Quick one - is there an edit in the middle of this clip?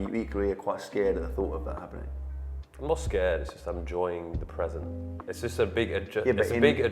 no; 0 cuts

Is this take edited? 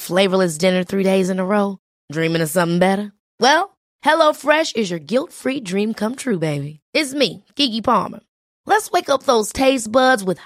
no; 0 cuts

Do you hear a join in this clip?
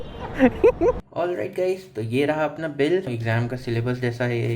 yes; 2 cuts; at 1.0 s, 3.1 s

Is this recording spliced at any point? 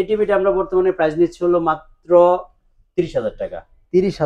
no; 0 cuts

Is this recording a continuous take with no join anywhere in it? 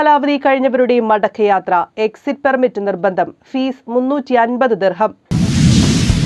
no; 1 cut; at 5.3 s

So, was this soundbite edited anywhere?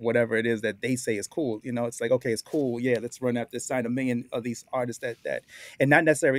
no; 0 cuts

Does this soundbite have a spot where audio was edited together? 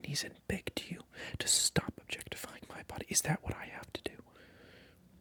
no; 0 cuts

